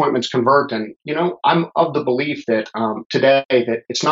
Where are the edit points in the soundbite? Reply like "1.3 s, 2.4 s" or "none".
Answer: none